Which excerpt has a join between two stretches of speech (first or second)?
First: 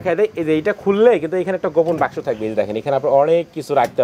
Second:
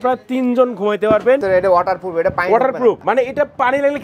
second